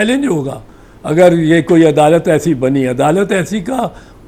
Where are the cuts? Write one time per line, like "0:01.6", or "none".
none